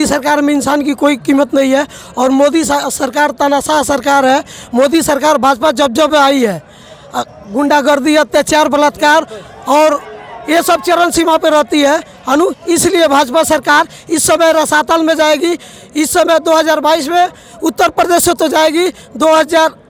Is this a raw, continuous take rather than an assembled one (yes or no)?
yes